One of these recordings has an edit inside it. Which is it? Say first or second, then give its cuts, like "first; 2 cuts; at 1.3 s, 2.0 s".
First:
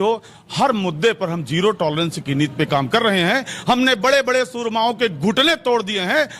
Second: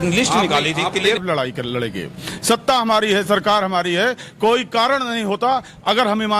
second; 1 cut; at 1.2 s